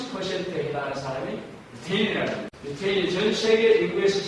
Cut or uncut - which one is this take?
cut